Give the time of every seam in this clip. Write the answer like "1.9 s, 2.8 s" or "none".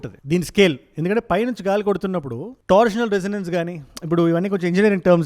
none